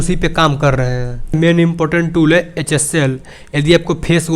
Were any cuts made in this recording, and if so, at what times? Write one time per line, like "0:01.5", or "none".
0:01.3